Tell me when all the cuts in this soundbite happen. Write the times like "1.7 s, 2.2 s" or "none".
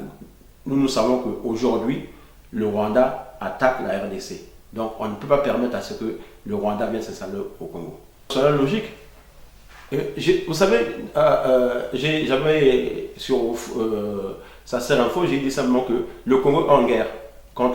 8.3 s